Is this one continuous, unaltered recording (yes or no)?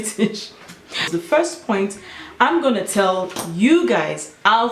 no